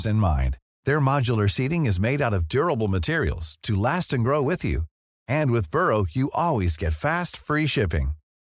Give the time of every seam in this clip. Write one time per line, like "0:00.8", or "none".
none